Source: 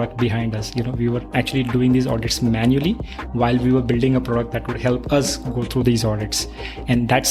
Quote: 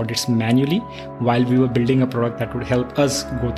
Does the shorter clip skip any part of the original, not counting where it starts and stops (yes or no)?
no